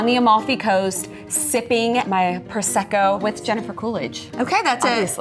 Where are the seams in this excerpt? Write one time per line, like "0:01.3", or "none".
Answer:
0:02.1
0:03.2